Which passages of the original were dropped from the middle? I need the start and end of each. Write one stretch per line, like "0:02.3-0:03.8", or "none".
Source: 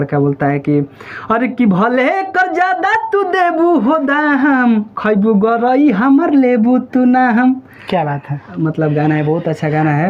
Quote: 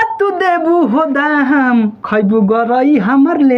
none

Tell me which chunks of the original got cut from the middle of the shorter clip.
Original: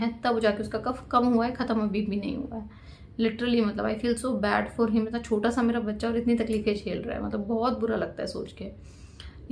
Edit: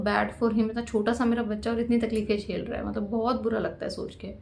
none

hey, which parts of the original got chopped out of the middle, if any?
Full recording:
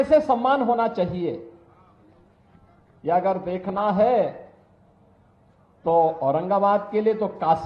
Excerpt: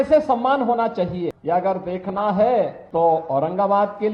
0:01.4-0:03.0
0:04.4-0:05.7

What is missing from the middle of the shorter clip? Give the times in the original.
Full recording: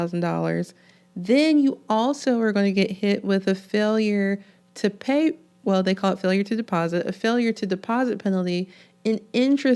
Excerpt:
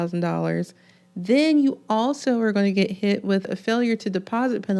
0:03.4-0:07.0

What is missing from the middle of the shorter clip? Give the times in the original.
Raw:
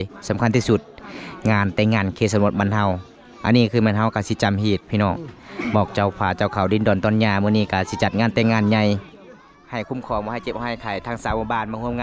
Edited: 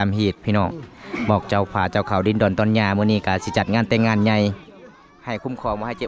none

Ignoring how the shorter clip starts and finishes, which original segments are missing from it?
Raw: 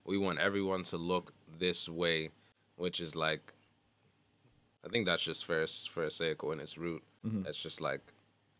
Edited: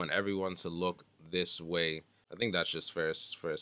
0:02.5-0:04.7

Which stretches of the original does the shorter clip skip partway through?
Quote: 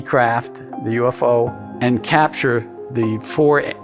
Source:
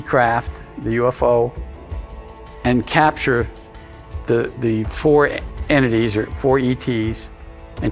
0:01.6-0:02.5
0:03.7-0:04.5

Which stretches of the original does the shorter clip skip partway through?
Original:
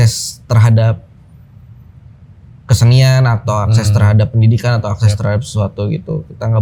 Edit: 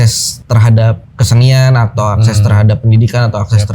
0:01.1-0:02.6

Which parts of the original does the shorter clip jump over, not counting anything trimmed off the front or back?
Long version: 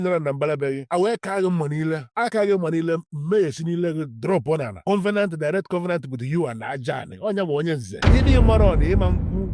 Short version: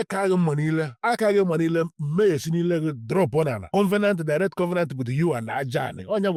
none

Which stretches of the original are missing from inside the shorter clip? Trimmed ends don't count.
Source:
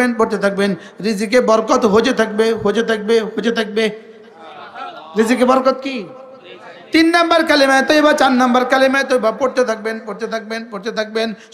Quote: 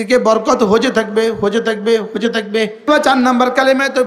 0:04.1-0:08.0

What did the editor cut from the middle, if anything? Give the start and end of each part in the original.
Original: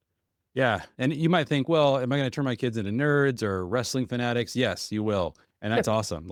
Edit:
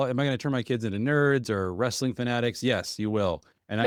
none

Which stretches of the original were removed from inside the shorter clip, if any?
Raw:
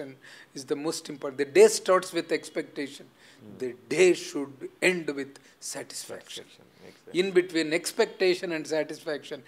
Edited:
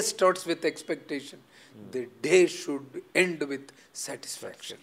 none

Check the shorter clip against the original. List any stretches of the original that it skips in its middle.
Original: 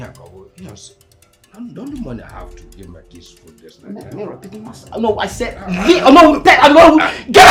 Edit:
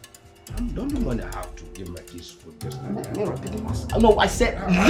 none

